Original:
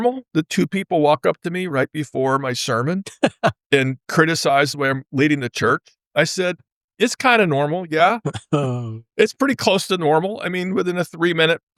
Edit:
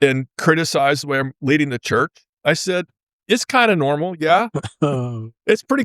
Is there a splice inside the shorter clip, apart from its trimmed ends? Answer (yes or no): no